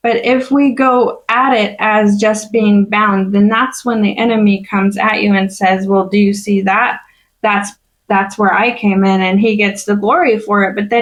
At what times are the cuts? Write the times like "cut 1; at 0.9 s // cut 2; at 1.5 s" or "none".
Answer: none